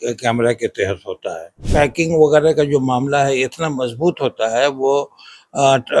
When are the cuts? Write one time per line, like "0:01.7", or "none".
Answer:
0:01.5